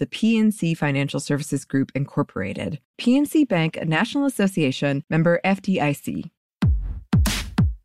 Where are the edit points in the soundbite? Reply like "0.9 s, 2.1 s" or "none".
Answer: 6.8 s